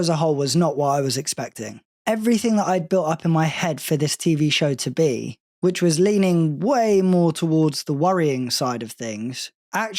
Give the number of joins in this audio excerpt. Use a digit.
0